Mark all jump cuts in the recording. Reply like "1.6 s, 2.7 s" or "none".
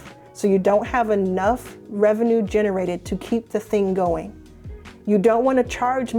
none

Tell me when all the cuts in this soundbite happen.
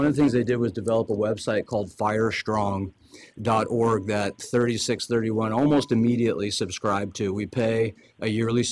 none

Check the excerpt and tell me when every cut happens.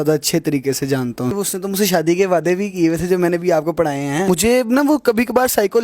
1.4 s, 4.3 s

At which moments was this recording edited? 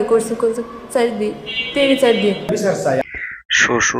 none

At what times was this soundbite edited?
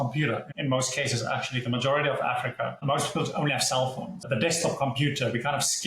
4.2 s

